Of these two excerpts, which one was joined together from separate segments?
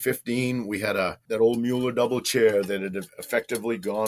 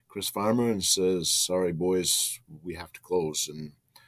first; 1 cut; at 1.2 s

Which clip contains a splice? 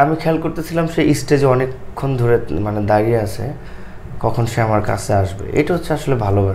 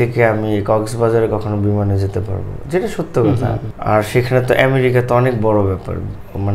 second; 1 cut; at 3.7 s

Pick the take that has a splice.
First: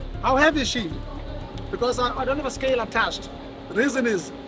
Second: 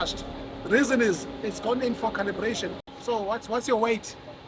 second; 1 cut; at 2.9 s

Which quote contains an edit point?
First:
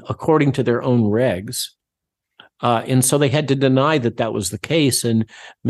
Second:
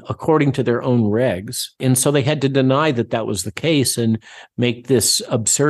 second; 1 cut; at 1.8 s

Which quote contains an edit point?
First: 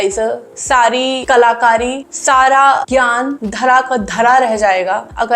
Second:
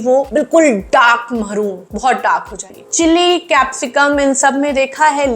second; 1 cut; at 2.7 s

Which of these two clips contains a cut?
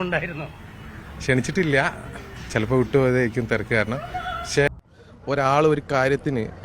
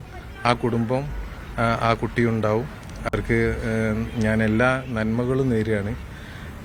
first; 1 cut; at 4.7 s

